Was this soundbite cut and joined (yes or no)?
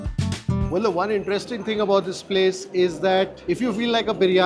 no